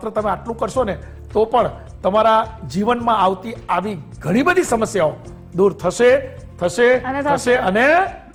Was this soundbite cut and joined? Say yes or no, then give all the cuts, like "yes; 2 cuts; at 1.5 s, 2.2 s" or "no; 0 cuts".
no; 0 cuts